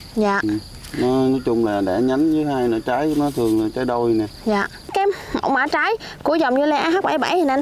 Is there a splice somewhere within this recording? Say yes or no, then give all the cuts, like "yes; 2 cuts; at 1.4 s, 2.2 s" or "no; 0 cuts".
yes; 1 cut; at 4.9 s